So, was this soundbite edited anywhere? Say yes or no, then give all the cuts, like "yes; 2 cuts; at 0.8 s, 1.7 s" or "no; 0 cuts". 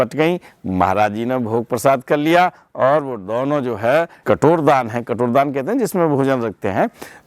yes; 1 cut; at 4.1 s